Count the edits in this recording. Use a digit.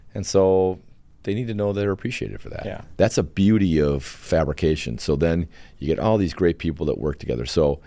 2